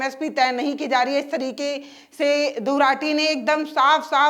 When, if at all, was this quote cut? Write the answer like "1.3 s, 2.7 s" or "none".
none